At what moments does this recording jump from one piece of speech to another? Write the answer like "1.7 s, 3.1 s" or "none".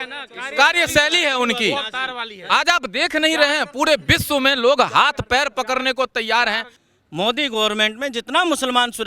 6.7 s